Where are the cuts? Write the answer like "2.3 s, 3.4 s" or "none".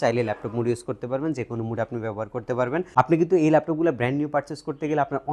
2.9 s